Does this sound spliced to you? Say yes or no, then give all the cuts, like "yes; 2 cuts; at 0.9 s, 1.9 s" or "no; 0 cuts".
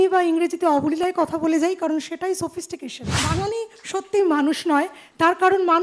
yes; 1 cut; at 3.0 s